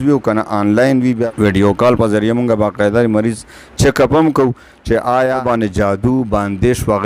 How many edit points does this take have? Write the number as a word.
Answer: two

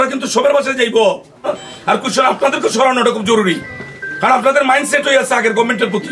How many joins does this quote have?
one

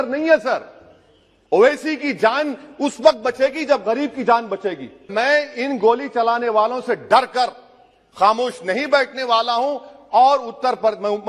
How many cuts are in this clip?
one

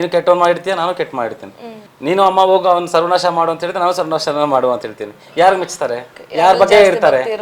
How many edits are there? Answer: zero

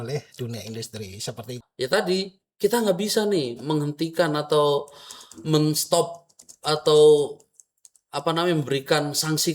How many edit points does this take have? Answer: one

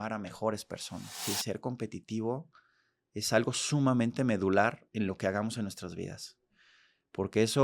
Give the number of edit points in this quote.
one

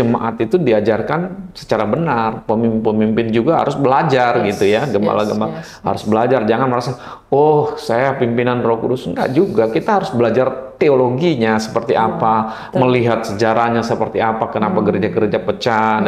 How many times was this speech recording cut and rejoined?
zero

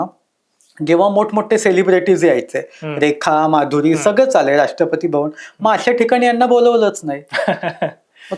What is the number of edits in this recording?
zero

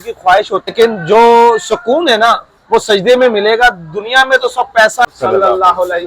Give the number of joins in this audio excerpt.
two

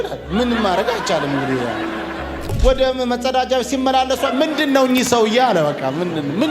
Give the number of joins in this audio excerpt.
one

